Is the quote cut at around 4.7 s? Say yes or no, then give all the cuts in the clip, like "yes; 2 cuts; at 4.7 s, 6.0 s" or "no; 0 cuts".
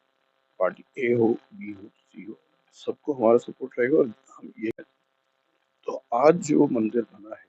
yes; 1 cut; at 4.7 s